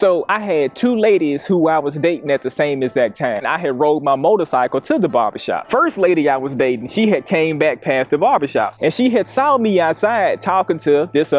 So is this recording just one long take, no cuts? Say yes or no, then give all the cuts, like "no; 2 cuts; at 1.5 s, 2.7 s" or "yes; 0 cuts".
no; 2 cuts; at 3.4 s, 5.6 s